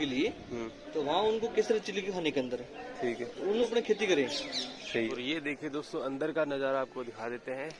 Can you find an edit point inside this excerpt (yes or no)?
yes